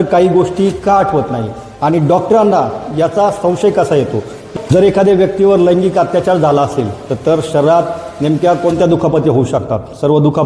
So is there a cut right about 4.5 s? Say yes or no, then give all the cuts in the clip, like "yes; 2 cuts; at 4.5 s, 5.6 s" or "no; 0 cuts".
yes; 1 cut; at 4.5 s